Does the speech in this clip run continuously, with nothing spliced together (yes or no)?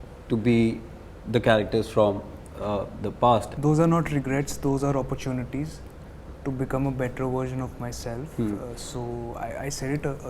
no